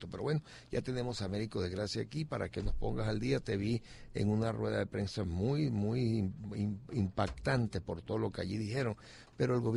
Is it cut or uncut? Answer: uncut